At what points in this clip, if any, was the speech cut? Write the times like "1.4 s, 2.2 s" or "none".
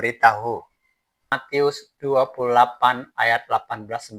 1.4 s